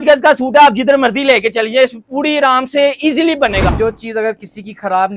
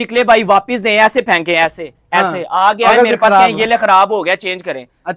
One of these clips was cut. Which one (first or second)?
first